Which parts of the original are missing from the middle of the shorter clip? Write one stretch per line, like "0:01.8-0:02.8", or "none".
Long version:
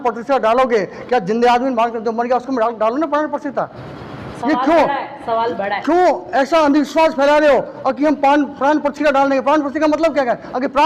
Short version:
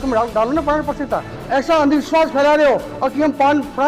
0:03.9-0:06.2